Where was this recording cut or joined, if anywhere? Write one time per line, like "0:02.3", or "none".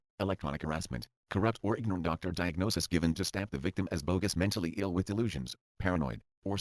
0:01.2